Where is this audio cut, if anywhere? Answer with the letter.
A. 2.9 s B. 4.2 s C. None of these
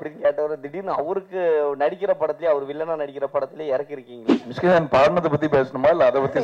B